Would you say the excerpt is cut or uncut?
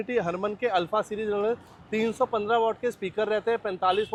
uncut